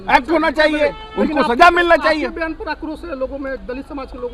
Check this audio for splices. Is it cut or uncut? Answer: uncut